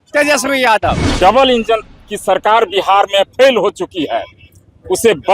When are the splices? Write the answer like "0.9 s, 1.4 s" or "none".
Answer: 1.1 s